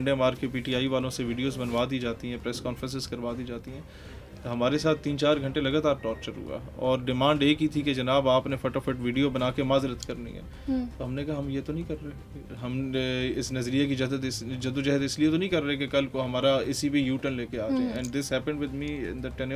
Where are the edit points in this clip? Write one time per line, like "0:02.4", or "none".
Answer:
none